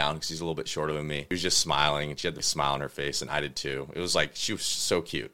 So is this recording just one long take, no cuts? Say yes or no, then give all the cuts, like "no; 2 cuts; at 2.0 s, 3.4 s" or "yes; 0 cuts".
no; 2 cuts; at 1.3 s, 2.4 s